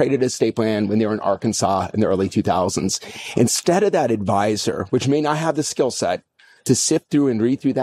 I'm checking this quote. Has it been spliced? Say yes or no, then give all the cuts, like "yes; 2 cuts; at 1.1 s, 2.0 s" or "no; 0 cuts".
no; 0 cuts